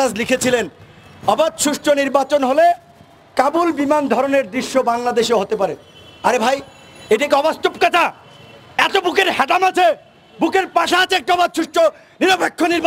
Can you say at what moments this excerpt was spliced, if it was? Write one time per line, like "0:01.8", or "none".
none